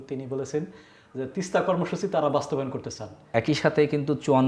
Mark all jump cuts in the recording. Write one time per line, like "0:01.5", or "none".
0:03.3